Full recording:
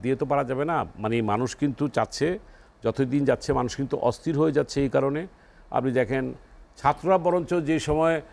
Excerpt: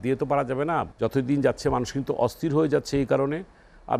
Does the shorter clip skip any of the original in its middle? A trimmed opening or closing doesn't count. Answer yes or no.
yes